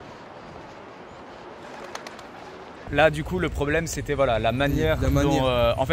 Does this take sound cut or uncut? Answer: uncut